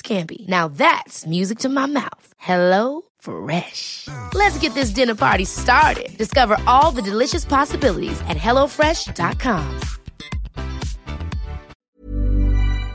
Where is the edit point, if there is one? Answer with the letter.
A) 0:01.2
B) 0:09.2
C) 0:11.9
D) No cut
C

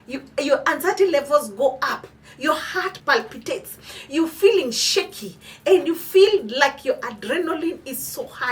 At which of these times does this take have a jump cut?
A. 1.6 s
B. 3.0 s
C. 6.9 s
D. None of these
B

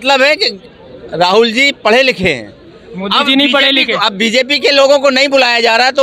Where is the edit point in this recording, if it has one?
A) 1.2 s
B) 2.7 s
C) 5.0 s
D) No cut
D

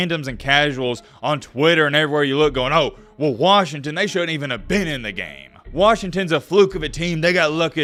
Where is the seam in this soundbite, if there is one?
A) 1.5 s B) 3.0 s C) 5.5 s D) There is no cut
D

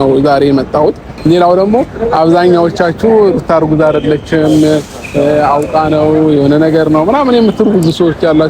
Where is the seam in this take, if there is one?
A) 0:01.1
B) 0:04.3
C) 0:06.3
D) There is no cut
A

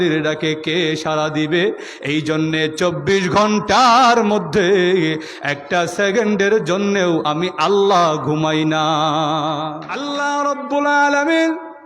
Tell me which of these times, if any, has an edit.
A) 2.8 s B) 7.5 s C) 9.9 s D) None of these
C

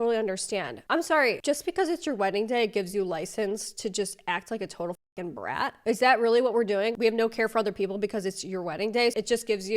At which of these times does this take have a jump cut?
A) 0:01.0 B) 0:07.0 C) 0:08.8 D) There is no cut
B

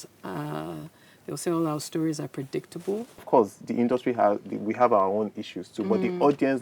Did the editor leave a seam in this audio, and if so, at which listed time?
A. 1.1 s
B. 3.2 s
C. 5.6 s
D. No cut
B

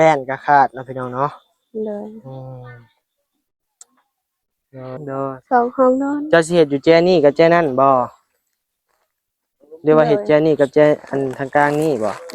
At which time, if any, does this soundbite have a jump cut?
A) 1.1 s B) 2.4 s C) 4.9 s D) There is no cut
C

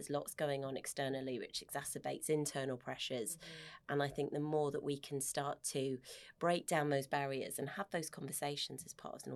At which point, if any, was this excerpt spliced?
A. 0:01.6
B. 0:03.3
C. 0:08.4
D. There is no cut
D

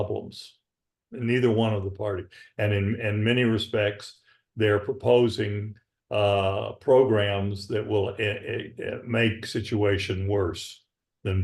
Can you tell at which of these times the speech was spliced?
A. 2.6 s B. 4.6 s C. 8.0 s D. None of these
D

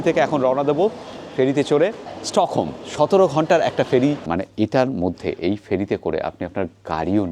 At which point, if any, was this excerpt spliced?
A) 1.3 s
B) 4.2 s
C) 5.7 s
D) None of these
B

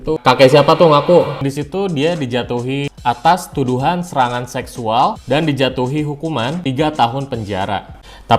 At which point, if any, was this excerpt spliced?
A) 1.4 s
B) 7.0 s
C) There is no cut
A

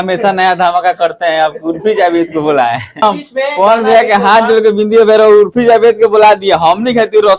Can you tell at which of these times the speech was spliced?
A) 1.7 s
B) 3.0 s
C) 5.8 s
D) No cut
B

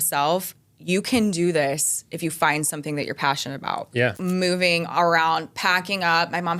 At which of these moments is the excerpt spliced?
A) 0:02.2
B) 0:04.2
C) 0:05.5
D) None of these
B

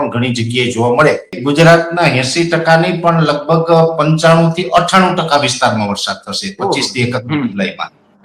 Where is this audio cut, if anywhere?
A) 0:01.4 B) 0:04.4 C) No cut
A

